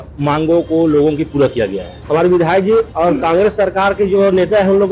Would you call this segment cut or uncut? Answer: cut